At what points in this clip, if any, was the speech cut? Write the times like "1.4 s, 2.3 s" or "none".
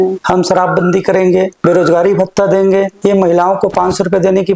1.5 s, 2.9 s